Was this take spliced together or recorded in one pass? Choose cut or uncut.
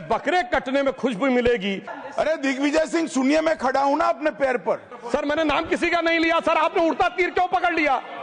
cut